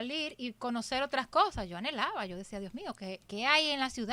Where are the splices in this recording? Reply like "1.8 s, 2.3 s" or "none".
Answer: none